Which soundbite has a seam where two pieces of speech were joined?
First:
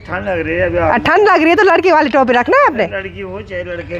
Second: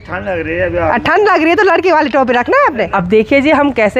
second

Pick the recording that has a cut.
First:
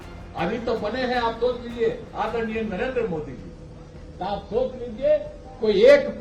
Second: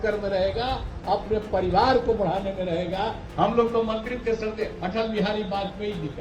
second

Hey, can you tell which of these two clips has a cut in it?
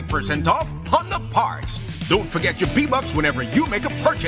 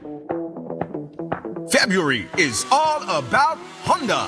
second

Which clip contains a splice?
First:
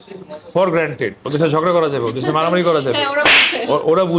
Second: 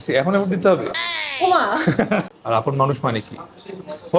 second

